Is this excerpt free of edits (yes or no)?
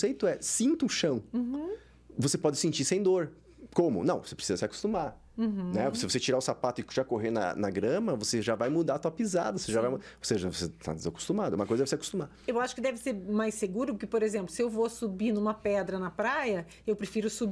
yes